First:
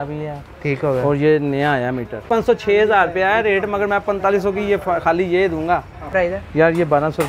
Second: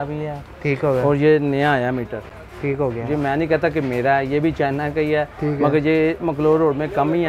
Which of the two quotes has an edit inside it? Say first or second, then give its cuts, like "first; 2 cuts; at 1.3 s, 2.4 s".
first; 2 cuts; at 2.2 s, 6.1 s